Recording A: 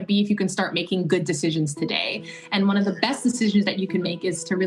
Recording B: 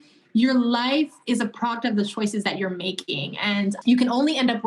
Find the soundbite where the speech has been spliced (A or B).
B